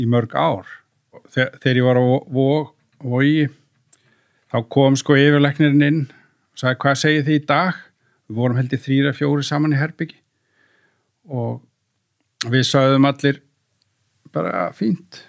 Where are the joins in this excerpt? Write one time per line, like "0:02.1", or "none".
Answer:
0:01.2